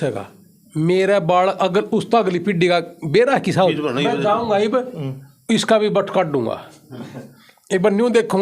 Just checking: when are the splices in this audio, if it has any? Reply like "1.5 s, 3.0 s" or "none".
3.7 s